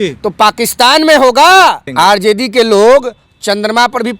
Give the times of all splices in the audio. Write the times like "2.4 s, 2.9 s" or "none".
1.9 s